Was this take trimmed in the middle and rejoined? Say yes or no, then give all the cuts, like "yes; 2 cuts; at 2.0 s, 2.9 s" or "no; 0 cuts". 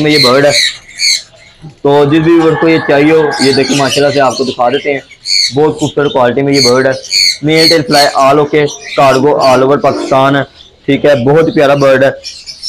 no; 0 cuts